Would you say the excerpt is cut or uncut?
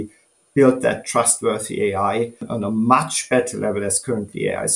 cut